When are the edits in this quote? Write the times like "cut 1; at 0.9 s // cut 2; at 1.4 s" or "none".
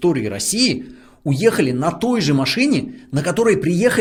none